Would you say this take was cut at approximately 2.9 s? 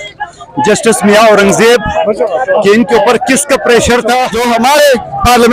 no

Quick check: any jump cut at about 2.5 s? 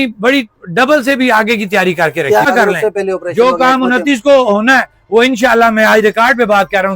yes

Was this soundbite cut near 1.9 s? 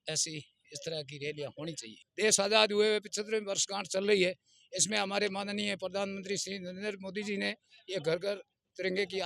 yes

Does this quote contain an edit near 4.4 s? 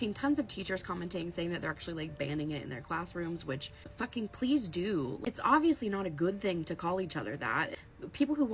no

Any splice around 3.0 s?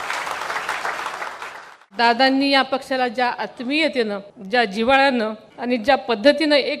no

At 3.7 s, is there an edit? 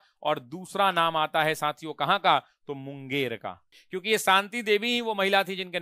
yes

